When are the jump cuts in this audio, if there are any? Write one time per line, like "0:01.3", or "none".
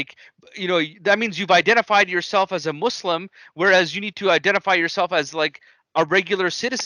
none